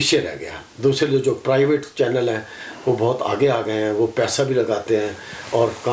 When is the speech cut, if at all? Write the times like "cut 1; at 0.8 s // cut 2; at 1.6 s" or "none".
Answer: none